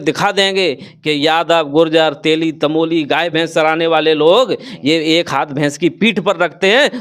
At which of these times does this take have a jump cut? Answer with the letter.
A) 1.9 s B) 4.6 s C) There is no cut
C